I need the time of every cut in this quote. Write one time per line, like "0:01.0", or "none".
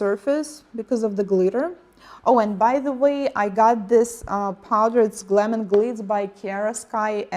0:03.0